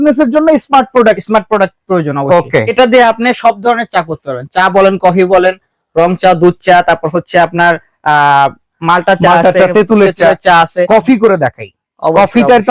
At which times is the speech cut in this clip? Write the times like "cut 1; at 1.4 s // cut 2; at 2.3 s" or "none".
cut 1; at 2.7 s // cut 2; at 10.8 s